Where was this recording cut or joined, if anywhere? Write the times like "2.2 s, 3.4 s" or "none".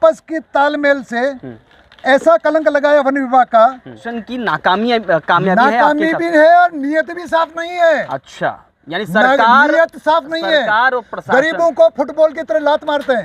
4.2 s